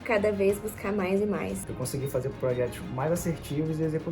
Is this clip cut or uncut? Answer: cut